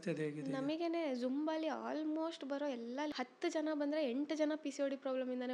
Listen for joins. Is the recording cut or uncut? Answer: cut